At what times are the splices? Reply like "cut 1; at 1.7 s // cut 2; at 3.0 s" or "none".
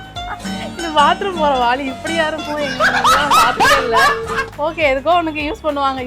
none